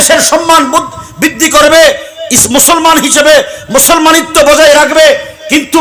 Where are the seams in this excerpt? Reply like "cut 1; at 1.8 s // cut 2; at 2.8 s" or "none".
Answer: none